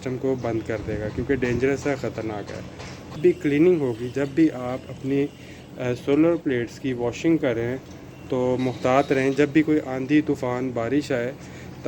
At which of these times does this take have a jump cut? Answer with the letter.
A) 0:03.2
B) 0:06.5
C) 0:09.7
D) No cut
A